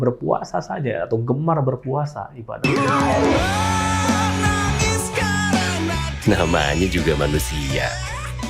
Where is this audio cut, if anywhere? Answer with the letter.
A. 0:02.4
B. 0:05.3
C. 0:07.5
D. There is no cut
A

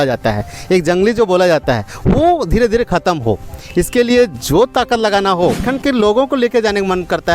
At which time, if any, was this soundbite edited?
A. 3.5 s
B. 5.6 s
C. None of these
B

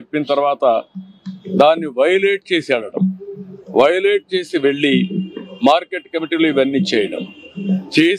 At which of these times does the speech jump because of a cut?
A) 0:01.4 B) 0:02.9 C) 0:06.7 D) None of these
B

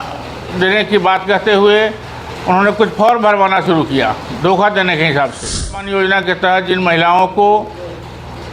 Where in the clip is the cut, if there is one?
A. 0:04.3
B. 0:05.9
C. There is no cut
B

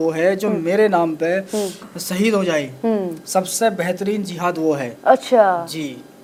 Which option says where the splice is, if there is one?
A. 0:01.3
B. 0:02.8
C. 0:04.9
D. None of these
D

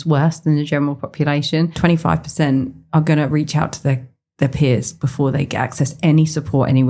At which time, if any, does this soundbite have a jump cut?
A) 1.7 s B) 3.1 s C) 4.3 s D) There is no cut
A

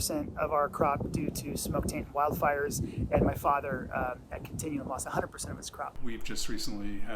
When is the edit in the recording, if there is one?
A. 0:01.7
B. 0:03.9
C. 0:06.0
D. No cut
C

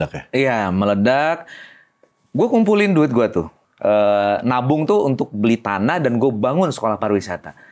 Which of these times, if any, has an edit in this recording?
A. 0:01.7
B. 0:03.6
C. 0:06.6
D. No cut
B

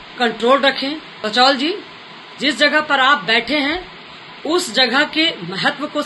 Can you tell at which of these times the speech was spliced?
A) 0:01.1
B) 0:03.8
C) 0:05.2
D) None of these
A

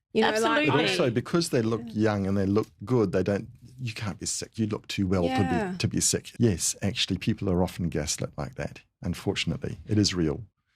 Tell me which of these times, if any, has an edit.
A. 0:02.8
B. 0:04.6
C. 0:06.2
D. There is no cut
C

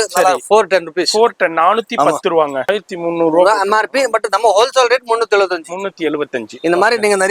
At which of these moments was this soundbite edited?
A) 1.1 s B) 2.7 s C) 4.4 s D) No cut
B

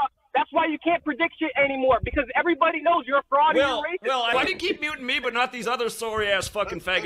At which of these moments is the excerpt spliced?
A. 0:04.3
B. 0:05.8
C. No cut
A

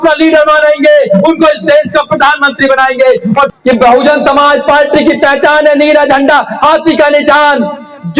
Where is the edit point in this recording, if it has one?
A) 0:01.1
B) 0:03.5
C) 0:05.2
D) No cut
B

